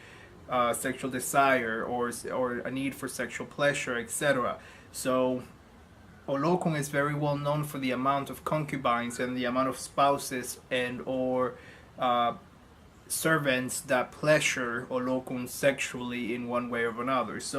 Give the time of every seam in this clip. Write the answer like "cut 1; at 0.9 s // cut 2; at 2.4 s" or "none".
cut 1; at 3.8 s